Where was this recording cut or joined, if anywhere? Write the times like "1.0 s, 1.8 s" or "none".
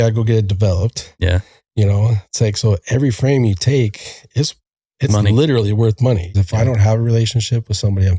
6.3 s